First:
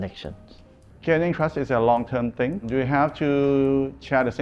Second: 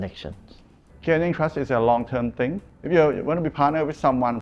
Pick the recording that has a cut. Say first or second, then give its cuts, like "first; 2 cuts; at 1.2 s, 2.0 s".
second; 1 cut; at 2.6 s